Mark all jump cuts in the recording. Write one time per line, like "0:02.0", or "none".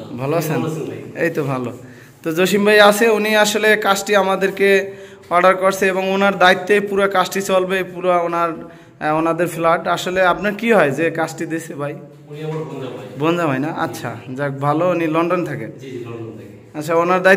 none